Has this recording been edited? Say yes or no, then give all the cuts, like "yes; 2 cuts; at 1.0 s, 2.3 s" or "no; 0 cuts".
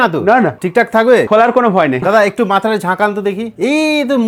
no; 0 cuts